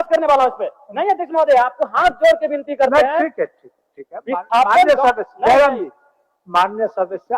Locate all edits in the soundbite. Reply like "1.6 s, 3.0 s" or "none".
none